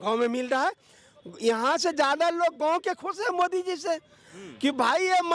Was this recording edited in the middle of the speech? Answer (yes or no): no